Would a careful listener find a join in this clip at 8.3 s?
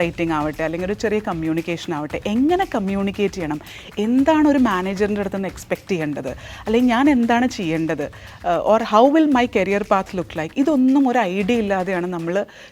no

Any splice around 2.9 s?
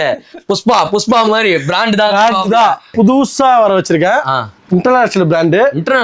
yes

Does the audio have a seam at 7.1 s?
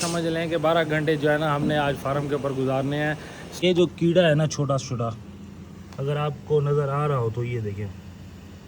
no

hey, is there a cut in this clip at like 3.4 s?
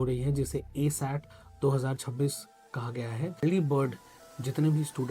yes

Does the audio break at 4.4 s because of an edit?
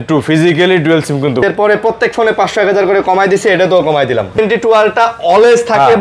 yes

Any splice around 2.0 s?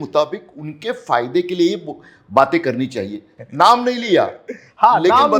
no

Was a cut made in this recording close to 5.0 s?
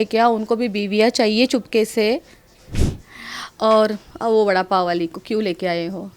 no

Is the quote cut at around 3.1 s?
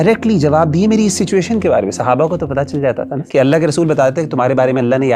yes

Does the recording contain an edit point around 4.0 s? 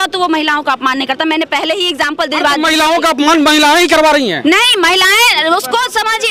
no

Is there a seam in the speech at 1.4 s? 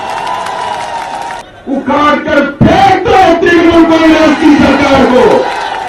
yes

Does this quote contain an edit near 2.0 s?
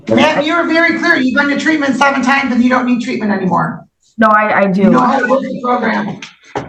no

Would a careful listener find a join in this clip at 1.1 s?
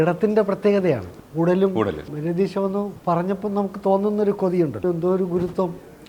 yes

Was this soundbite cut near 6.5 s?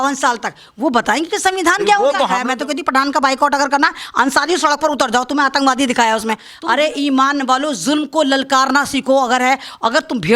yes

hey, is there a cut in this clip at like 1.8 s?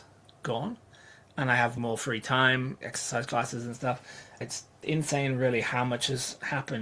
yes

